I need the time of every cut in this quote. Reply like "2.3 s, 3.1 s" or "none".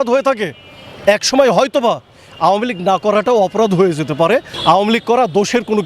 4.5 s